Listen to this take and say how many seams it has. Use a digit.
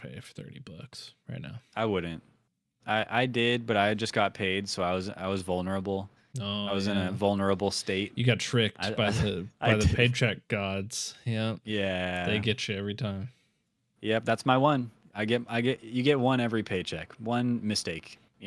0